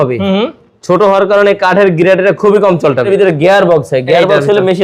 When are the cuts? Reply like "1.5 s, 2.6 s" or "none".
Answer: 3.1 s